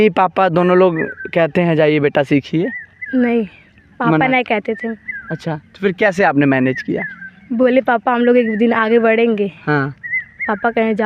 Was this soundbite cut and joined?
no; 0 cuts

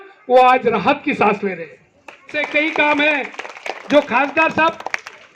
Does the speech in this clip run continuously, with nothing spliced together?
no; 1 cut; at 2.3 s

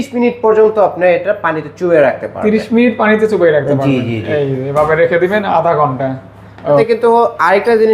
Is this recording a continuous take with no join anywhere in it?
no; 1 cut; at 6.8 s

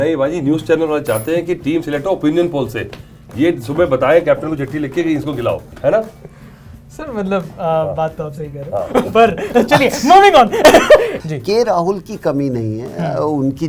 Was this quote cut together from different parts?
yes; 1 cut; at 11.2 s

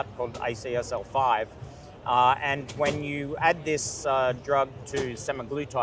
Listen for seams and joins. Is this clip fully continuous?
yes; 0 cuts

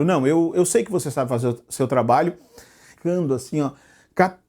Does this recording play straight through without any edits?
no; 1 cut; at 2.5 s

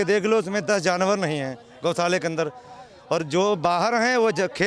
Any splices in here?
no; 0 cuts

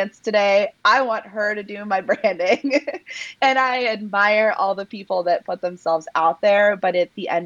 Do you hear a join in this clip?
no; 0 cuts

